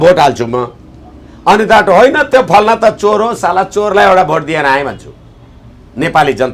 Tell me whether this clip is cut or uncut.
uncut